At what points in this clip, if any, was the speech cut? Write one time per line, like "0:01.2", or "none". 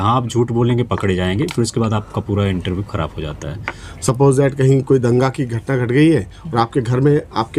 0:03.8